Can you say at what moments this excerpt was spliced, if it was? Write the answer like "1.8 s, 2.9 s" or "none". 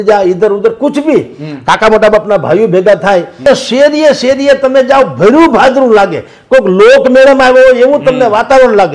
3.4 s